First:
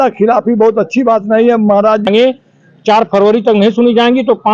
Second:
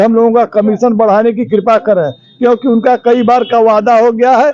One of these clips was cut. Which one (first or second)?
first